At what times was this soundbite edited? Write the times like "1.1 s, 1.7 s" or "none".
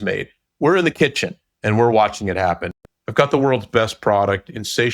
2.7 s